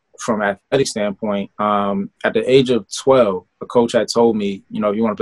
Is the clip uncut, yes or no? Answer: no